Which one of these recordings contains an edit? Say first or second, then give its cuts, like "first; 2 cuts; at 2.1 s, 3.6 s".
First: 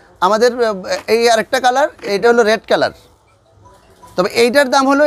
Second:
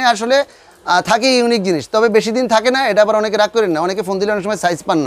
first; 1 cut; at 2.2 s